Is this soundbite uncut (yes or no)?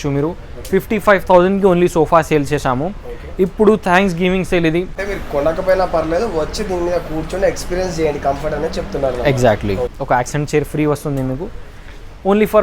no